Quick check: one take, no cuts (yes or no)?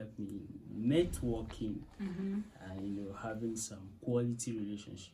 yes